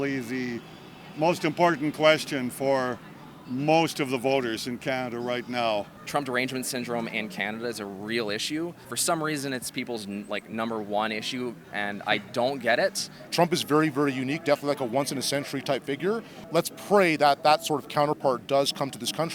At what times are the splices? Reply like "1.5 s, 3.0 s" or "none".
6.0 s, 8.9 s, 11.6 s, 13.2 s, 16.3 s